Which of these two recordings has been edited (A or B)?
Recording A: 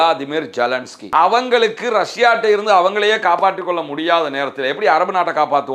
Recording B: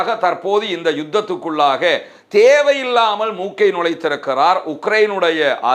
A